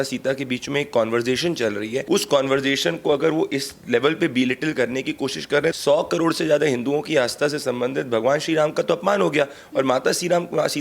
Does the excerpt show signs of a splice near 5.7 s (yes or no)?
yes